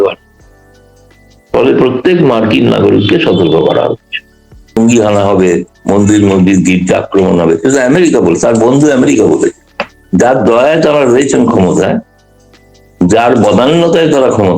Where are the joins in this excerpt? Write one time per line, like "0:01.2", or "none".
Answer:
0:04.8